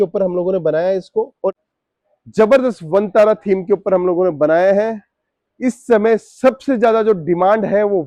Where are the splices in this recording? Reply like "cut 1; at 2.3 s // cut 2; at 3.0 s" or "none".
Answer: cut 1; at 1.6 s